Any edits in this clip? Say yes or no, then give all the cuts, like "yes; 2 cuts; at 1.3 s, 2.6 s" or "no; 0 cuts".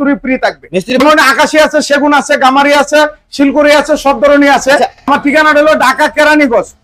yes; 2 cuts; at 1.0 s, 5.1 s